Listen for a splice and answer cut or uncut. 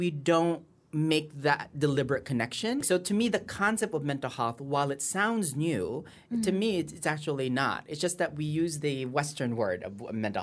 cut